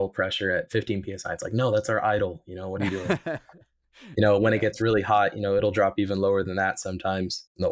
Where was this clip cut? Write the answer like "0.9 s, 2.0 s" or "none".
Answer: none